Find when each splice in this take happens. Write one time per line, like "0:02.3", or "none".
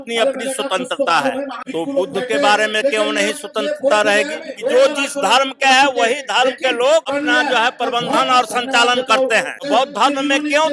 0:01.6
0:04.4
0:07.1
0:09.6